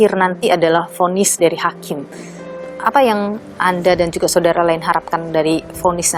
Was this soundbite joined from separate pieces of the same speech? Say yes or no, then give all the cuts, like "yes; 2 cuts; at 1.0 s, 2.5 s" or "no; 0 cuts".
no; 0 cuts